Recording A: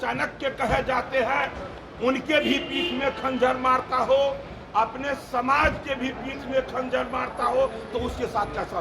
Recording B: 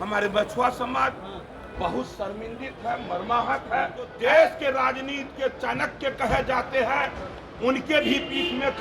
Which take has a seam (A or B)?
B